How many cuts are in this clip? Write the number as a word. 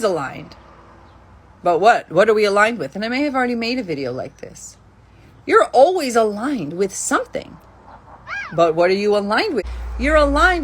one